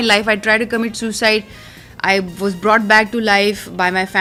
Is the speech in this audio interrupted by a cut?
no; 0 cuts

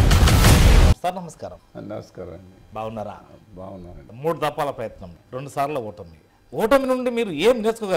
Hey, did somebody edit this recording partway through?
no; 0 cuts

